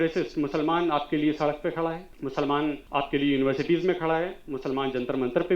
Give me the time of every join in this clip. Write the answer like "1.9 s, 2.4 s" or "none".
2.1 s, 2.8 s